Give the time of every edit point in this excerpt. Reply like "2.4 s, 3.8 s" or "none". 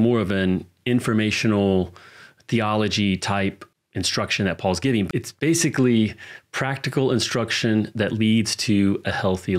3.7 s, 5.1 s